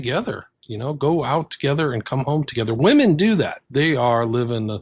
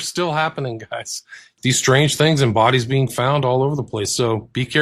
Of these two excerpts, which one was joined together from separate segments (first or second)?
second